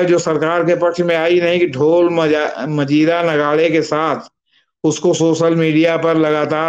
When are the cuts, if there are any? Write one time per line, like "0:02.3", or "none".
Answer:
none